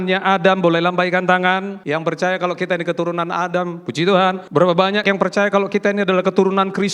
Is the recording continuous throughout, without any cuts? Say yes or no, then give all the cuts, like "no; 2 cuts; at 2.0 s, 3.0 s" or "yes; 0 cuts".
no; 2 cuts; at 1.8 s, 4.8 s